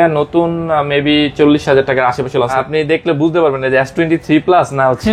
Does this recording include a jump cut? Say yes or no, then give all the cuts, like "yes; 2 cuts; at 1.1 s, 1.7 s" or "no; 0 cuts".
yes; 1 cut; at 2.5 s